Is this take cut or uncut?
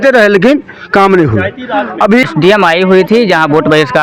cut